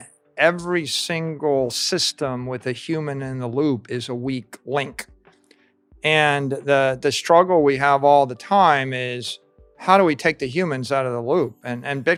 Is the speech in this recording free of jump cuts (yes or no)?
yes